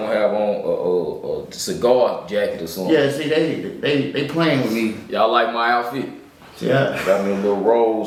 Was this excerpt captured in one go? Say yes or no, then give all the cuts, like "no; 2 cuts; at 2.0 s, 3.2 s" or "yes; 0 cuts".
yes; 0 cuts